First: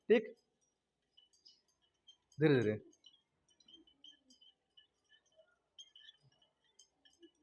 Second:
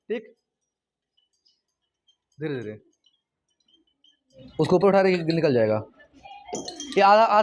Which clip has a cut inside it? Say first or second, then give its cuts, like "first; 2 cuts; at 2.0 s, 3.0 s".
second; 1 cut; at 4.3 s